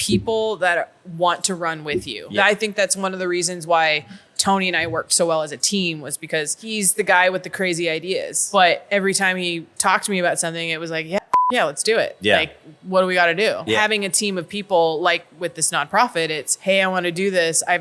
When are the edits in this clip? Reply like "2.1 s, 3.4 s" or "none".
2.2 s, 6.6 s, 8.4 s, 13.8 s, 16.5 s